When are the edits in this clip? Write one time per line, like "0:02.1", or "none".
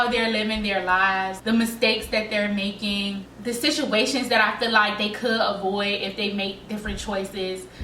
none